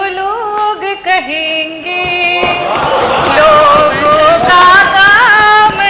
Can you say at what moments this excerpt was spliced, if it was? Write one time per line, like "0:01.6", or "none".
none